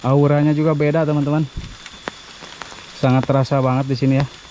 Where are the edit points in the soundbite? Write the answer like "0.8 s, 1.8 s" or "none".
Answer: none